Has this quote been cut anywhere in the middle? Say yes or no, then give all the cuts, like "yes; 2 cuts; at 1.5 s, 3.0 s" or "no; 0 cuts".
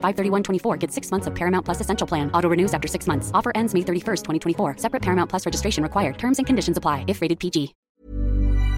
yes; 1 cut; at 7.9 s